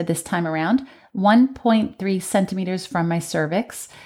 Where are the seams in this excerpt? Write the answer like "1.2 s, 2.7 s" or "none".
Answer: none